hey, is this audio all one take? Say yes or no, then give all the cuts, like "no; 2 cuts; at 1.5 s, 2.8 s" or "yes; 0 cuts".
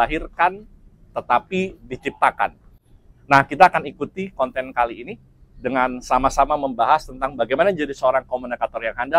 yes; 0 cuts